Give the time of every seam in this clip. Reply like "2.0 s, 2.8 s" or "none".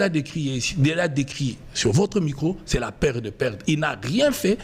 none